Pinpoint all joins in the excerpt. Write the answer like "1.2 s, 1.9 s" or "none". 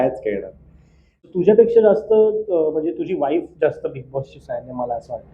1.1 s